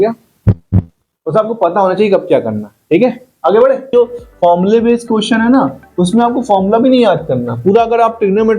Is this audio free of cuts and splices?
no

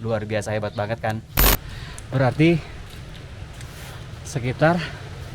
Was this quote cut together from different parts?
yes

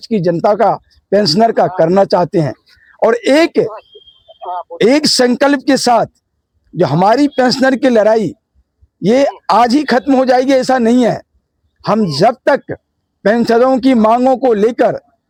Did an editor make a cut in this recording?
no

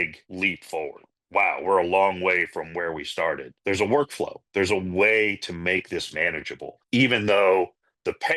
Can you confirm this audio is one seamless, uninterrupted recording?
no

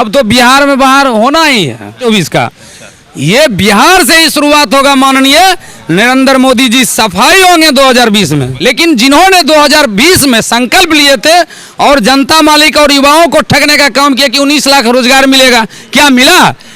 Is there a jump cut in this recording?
yes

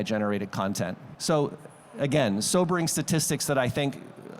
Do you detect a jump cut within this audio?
yes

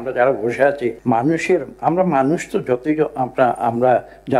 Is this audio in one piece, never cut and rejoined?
no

